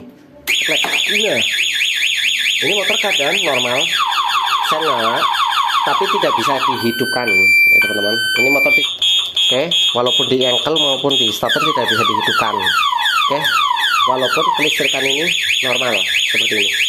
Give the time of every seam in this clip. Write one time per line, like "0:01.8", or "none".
0:08.8